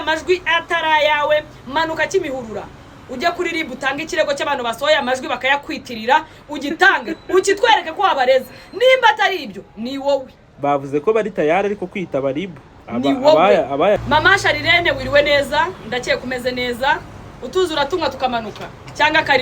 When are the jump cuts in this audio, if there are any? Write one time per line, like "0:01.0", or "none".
0:14.0